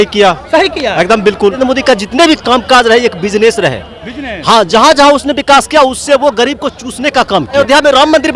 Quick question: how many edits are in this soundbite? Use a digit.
2